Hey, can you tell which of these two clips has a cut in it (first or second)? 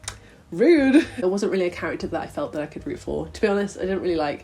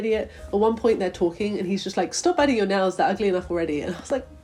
first